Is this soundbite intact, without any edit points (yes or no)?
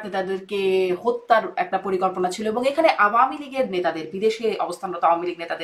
yes